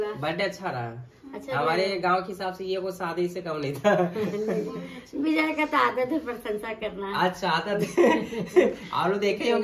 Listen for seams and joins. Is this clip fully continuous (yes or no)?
yes